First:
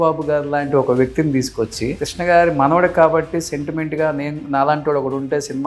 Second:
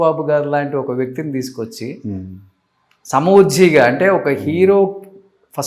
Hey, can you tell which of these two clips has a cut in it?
first; 1 cut; at 2.0 s

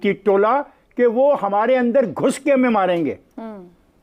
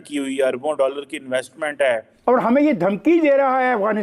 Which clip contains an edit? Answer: second; 1 cut; at 2.1 s

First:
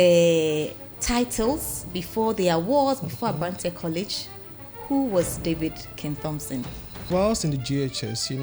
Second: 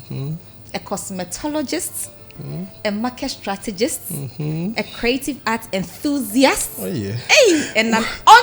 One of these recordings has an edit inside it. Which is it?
first; 1 cut; at 7.1 s

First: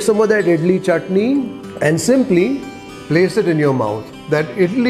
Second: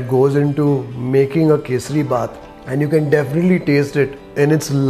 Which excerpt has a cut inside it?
first; 1 cut; at 1.6 s

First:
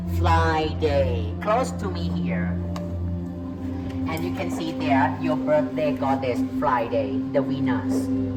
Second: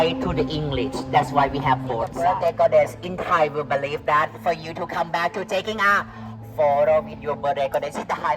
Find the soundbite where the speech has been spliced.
second; 1 cut; at 2.1 s

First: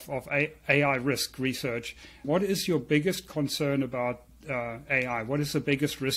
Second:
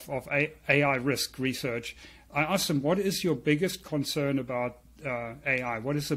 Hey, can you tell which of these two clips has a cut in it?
first; 1 cut; at 2.3 s

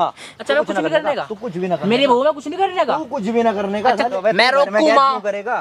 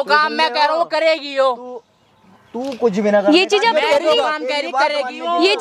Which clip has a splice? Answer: first; 1 cut; at 4.1 s

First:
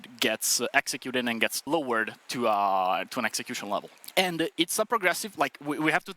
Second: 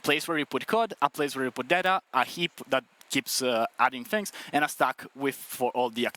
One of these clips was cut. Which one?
first; 2 cuts; at 1.7 s, 4.0 s

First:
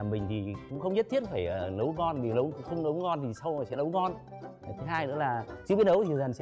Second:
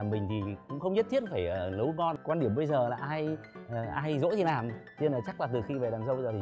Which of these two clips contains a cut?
second; 1 cut; at 2.2 s

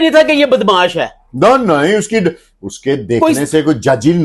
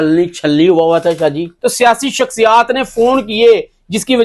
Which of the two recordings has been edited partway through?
second; 1 cut; at 1.5 s

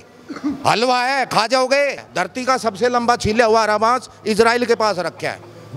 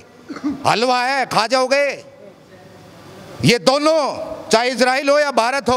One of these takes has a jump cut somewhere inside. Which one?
first; 1 cut; at 2.0 s

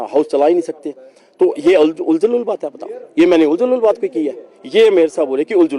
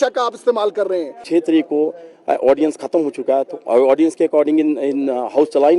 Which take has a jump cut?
second; 1 cut; at 1.2 s

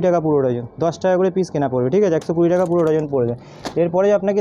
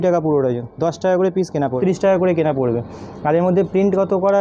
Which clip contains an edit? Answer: second; 1 cut; at 1.8 s

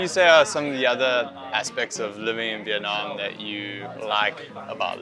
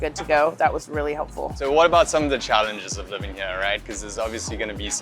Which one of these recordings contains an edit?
second; 1 cut; at 1.5 s

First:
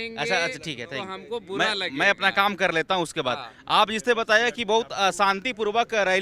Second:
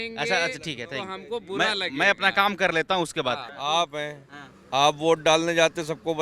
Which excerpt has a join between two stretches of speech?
second; 1 cut; at 3.5 s

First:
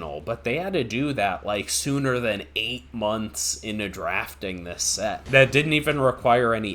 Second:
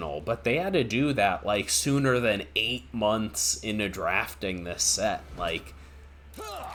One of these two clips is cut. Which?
first; 1 cut; at 5.2 s

